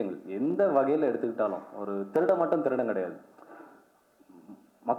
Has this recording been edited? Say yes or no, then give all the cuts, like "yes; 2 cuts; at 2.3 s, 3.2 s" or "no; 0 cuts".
no; 0 cuts